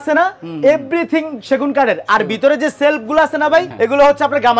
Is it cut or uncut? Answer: uncut